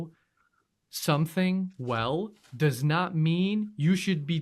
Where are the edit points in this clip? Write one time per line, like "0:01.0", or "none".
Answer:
none